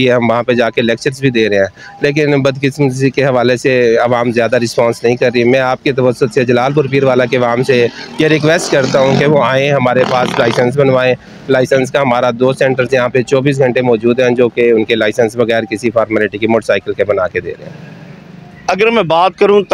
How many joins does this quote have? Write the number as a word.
zero